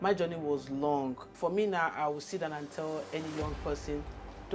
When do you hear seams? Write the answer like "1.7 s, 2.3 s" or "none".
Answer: 1.2 s

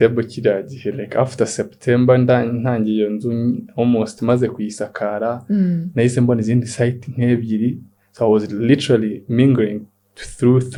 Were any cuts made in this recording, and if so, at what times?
none

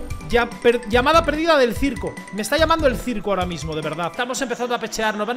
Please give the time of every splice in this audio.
4.1 s

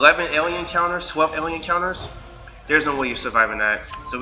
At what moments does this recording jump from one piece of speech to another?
none

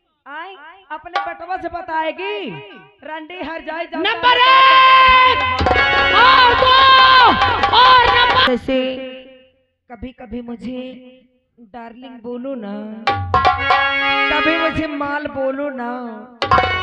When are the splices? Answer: 8.5 s

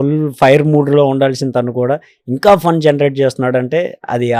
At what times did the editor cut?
none

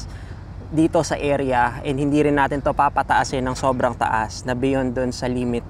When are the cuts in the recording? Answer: none

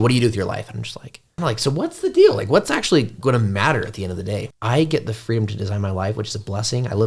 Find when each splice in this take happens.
1.2 s, 4.5 s

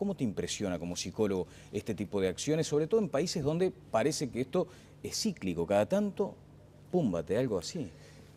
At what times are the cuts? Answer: 2.1 s

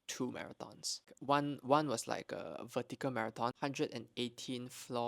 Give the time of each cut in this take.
1.1 s, 3.5 s

